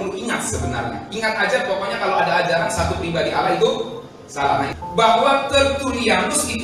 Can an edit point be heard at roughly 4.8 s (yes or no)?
yes